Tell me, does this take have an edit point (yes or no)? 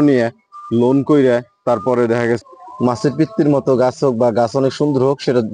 yes